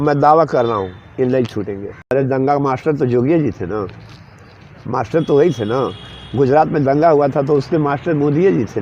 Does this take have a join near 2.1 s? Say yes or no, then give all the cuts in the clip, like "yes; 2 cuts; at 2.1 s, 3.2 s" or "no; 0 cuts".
yes; 1 cut; at 2.1 s